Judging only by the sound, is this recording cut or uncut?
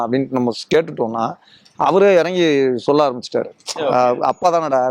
uncut